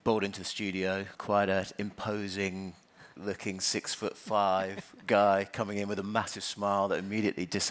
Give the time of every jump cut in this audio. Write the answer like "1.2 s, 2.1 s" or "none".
1.1 s